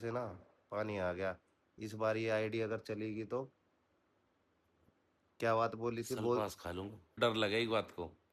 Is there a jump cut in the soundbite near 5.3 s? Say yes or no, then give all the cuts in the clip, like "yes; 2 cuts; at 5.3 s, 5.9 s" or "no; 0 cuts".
no; 1 cut; at 7.2 s